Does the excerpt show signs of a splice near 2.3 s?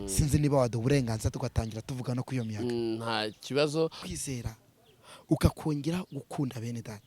no; 1 cut; at 4.0 s

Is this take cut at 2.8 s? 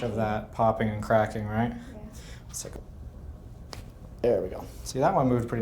yes; 1 cut; at 2.8 s

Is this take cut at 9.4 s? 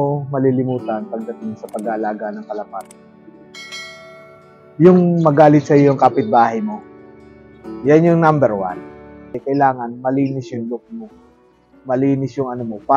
yes; 1 cut; at 9.4 s

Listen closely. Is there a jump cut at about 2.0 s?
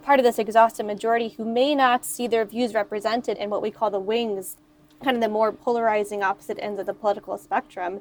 no; 2 cuts; at 3.3 s, 4.5 s

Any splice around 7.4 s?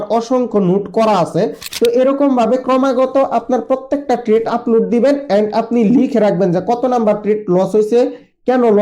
no; 1 cut; at 1.6 s

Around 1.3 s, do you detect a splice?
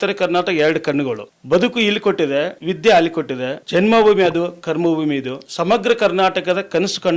yes; 4 cuts; at 1.3 s, 2.6 s, 3.6 s, 5.4 s

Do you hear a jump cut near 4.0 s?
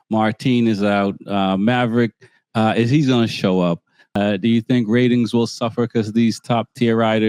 yes; 1 cut; at 4.0 s

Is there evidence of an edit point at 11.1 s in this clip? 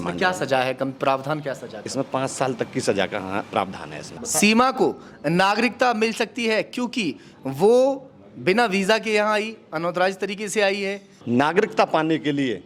yes; 2 cuts; at 4.1 s, 11.1 s

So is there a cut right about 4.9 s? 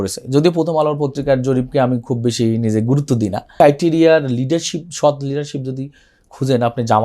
no; 1 cut; at 3.5 s

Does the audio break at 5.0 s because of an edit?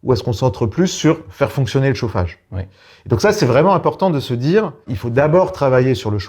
yes; 1 cut; at 5.0 s

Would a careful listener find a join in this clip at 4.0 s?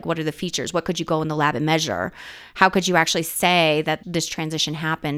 yes; 1 cut; at 4.0 s

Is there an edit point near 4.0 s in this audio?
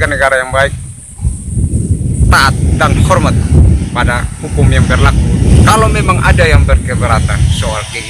no; 1 cut; at 5.4 s

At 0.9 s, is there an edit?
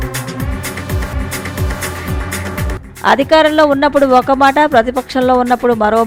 yes; 1 cut; at 0.9 s

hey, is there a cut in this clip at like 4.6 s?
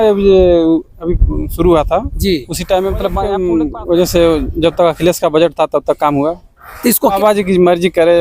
no; 2 cuts; at 3.3 s, 7.2 s

